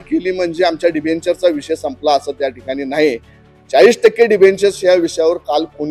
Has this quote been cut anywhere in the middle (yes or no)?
no